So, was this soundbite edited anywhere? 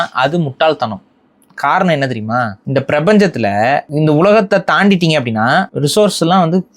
yes; 3 cuts; at 2.6 s, 3.9 s, 5.7 s

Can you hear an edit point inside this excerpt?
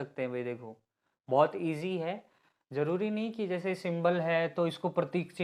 no; 0 cuts

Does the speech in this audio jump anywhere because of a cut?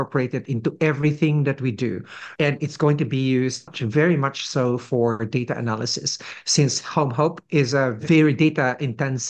yes; 3 cuts; at 2.2 s, 3.8 s, 8.0 s

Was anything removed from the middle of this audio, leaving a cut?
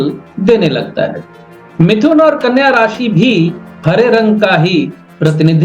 no; 0 cuts

